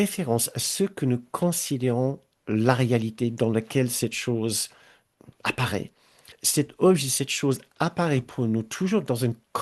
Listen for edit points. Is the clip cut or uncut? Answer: cut